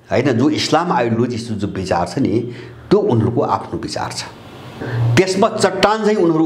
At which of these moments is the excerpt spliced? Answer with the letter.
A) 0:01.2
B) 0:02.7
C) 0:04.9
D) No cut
C